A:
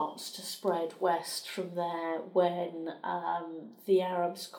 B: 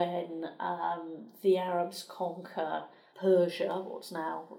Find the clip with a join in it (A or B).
B